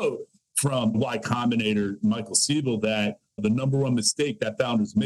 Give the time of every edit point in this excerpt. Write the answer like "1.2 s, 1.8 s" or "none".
0.9 s